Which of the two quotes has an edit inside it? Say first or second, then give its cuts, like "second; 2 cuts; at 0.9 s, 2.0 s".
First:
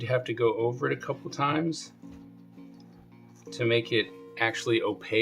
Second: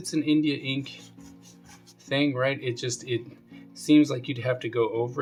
first; 2 cuts; at 1.8 s, 3.2 s